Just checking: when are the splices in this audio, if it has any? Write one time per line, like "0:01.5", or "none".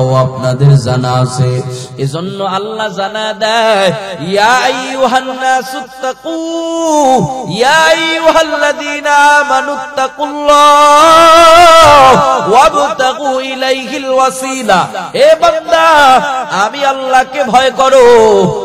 none

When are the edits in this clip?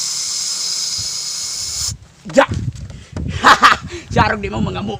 none

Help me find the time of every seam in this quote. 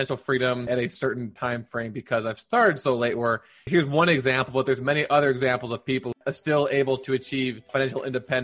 0:06.2
0:07.6

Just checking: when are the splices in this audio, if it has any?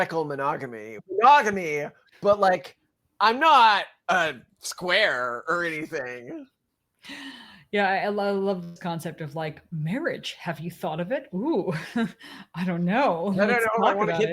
0:01.0

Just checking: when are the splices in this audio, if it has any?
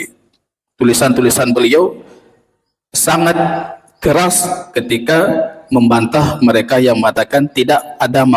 none

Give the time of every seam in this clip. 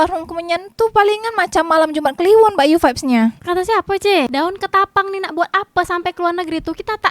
0:04.3

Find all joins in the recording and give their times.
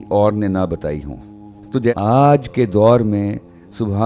0:01.9

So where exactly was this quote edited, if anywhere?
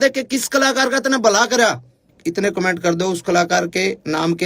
0:02.1

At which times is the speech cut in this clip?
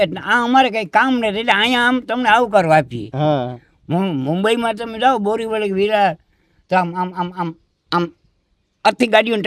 none

